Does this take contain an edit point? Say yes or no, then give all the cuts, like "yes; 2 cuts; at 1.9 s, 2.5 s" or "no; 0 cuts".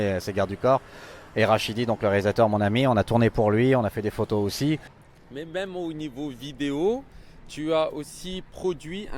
no; 0 cuts